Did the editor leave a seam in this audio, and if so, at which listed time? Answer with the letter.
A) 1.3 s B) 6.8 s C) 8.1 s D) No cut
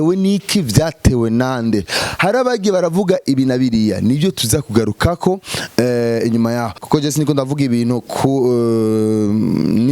B